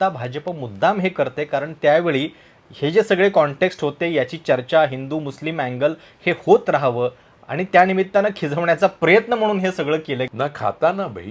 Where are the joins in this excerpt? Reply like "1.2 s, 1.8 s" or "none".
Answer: 10.3 s